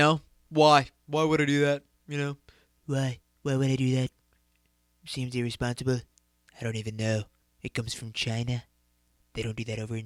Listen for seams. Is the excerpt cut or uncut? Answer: uncut